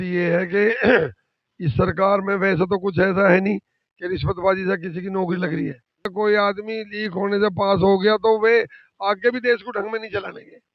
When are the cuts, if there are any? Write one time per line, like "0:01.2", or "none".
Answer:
0:06.1